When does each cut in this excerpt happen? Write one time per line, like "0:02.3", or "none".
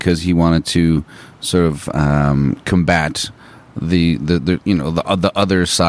none